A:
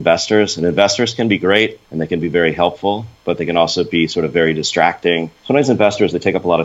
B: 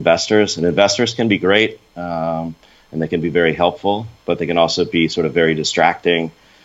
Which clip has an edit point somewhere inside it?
A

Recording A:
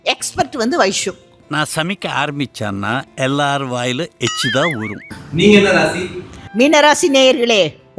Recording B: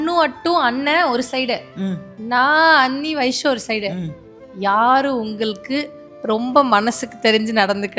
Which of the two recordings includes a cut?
A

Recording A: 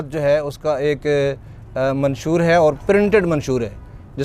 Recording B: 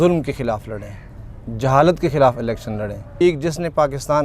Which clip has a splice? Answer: B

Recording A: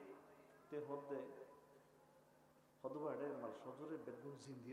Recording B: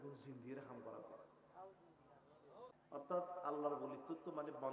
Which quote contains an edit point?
B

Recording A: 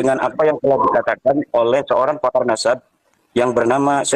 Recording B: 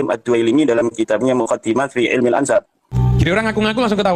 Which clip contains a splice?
B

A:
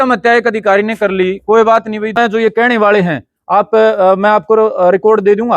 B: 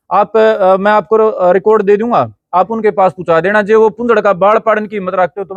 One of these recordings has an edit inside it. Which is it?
A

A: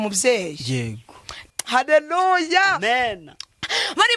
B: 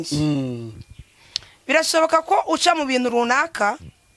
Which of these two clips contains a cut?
A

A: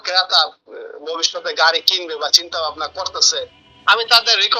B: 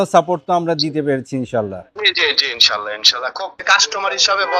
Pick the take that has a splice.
B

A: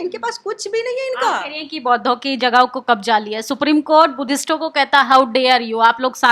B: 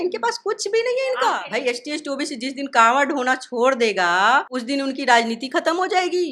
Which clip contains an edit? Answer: B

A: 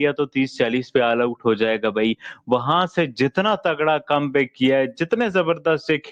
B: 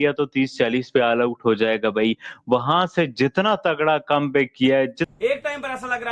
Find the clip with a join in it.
B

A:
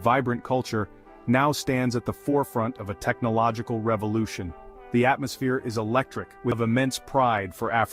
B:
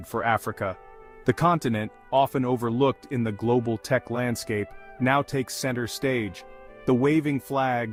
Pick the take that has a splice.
A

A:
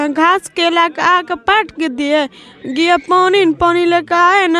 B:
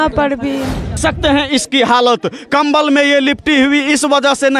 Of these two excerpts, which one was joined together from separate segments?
B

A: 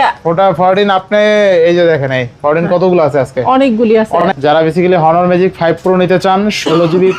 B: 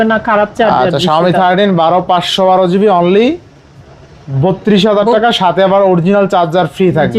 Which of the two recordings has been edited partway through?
A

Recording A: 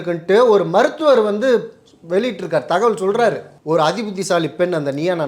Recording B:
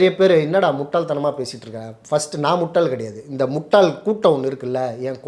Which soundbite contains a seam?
A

